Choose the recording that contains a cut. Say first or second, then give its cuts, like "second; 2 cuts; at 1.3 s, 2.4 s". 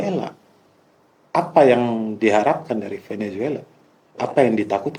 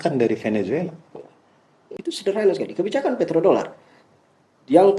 second; 1 cut; at 1.9 s